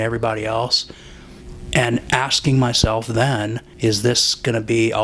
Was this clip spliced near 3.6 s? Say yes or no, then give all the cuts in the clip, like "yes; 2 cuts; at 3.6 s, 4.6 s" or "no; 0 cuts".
yes; 1 cut; at 3.6 s